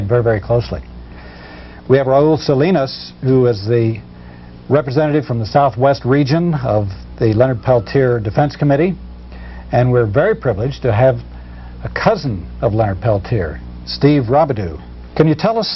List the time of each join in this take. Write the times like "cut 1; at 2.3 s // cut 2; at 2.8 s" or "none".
cut 1; at 13.8 s